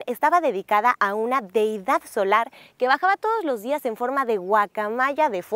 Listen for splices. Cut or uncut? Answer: uncut